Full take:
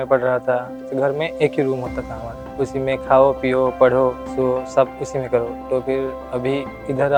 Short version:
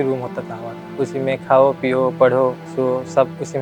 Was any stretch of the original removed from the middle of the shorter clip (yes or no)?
no